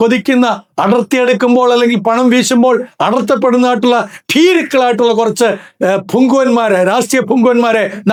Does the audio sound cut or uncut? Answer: uncut